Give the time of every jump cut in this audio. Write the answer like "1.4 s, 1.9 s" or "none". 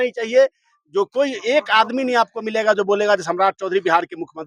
none